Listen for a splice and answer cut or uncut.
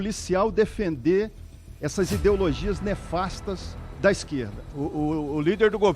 cut